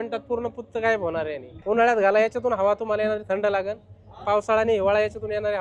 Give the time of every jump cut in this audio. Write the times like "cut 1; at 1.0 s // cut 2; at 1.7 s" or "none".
cut 1; at 1.5 s